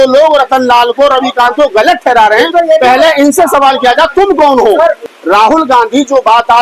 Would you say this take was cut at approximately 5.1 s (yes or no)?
yes